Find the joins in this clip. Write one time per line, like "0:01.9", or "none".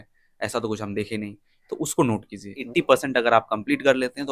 0:02.6